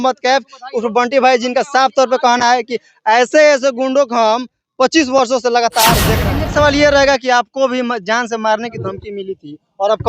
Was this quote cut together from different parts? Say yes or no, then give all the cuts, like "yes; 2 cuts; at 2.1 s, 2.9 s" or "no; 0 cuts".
yes; 1 cut; at 6.1 s